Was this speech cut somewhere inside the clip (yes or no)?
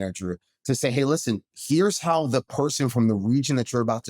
yes